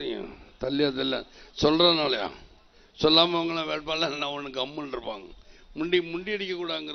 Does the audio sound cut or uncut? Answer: uncut